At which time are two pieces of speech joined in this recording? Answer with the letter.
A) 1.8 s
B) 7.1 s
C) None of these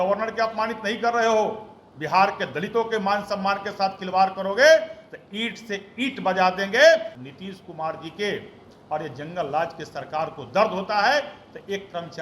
B